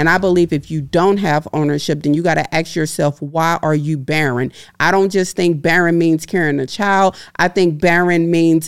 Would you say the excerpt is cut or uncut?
uncut